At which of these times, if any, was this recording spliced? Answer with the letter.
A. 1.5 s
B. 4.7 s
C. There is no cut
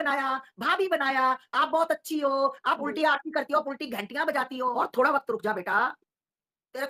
B